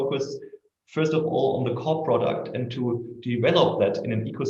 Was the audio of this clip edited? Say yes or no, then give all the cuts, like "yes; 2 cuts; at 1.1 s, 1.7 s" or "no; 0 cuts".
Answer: no; 0 cuts